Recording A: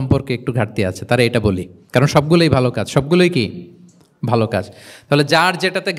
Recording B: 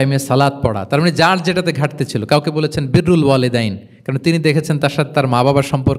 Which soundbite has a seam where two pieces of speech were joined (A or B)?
A